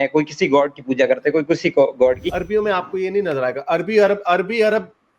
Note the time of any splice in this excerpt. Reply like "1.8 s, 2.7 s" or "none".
2.3 s